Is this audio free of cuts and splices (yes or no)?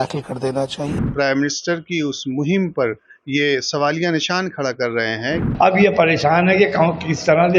no